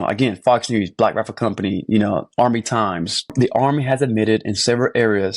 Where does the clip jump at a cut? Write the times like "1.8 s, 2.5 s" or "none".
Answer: 3.3 s